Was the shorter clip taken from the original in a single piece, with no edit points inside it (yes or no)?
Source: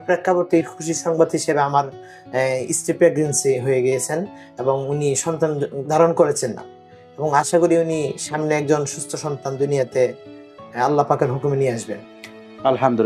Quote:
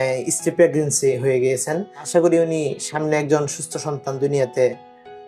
no